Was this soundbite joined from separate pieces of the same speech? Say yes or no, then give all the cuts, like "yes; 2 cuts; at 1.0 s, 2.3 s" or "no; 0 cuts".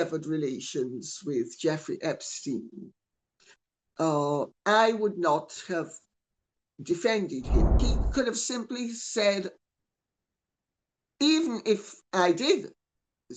yes; 1 cut; at 7.8 s